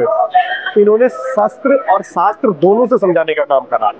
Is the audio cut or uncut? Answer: uncut